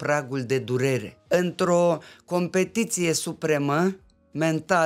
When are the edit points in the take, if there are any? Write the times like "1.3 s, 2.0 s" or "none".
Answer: 1.1 s